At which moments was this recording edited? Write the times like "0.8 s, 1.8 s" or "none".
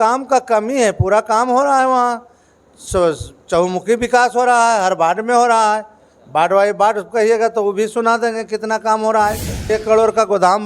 9.6 s